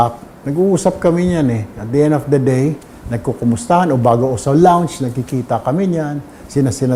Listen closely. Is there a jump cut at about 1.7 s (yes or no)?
no